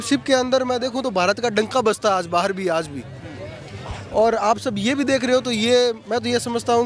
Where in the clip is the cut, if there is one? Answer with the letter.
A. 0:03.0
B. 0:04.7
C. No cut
C